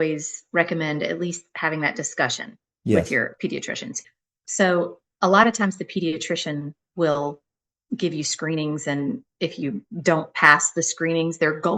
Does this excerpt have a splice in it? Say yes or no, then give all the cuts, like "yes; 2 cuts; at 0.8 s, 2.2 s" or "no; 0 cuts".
yes; 1 cut; at 3.9 s